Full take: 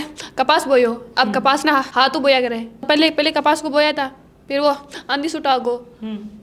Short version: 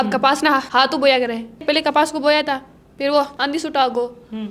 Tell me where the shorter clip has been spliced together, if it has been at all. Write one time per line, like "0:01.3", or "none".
0:01.6
0:03.3